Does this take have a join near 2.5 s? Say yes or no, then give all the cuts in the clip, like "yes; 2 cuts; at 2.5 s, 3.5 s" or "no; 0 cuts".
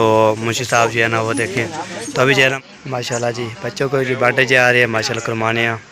yes; 1 cut; at 2.5 s